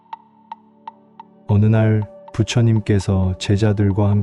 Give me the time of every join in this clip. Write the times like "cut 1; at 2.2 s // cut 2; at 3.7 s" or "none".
cut 1; at 1.4 s